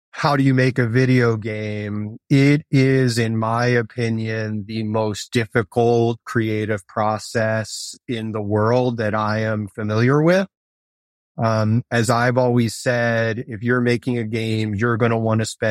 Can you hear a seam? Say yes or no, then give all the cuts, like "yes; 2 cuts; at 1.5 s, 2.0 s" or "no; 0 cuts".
yes; 1 cut; at 2.2 s